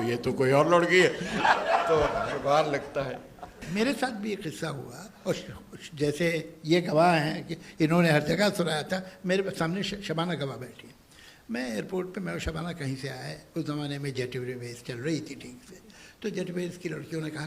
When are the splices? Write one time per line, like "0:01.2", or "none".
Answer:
0:03.6